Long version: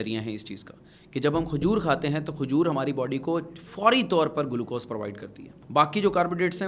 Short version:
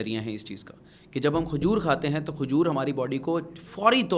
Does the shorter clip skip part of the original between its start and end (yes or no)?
no